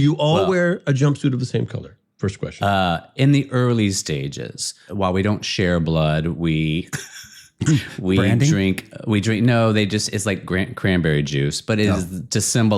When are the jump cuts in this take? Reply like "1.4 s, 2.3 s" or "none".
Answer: 4.8 s